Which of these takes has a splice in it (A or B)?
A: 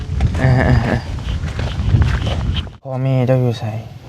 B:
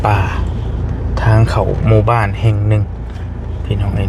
A